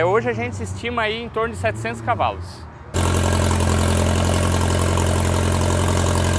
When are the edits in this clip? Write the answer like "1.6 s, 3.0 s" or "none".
none